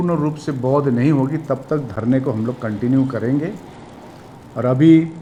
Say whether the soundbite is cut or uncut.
uncut